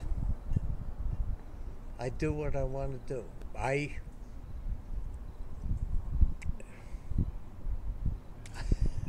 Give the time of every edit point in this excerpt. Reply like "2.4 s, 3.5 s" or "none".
none